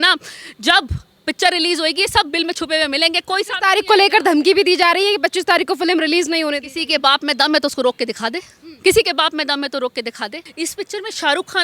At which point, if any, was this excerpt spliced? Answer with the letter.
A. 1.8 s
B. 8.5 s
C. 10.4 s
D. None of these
C